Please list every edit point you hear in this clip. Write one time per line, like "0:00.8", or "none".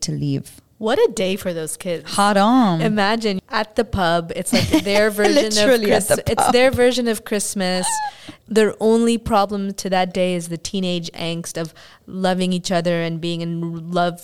none